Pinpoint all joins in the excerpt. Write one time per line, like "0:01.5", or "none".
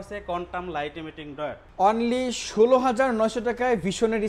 0:01.6